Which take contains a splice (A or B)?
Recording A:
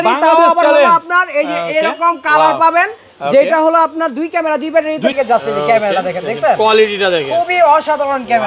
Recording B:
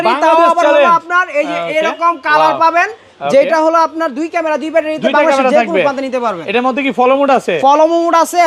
A